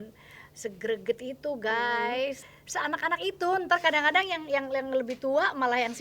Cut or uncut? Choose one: cut